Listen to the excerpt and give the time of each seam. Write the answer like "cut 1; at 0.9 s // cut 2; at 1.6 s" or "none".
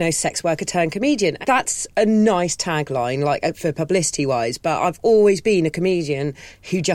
cut 1; at 1.4 s